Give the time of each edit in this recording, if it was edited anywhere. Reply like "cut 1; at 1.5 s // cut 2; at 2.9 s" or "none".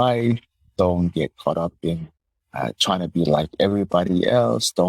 none